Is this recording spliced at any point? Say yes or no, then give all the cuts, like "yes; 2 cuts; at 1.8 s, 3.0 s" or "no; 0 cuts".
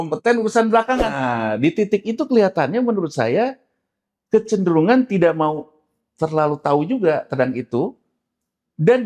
yes; 1 cut; at 1.2 s